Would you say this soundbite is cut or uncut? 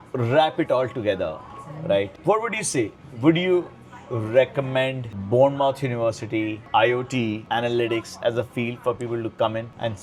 uncut